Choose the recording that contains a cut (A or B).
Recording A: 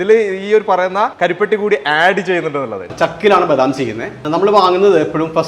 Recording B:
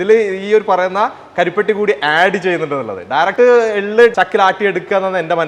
A